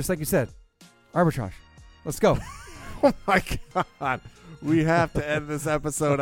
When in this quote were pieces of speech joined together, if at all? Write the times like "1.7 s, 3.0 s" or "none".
none